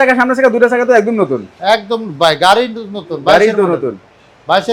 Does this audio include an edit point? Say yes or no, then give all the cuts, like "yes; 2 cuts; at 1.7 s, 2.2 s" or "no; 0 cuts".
no; 0 cuts